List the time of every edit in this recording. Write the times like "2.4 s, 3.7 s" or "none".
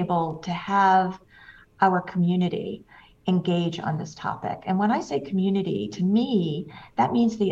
none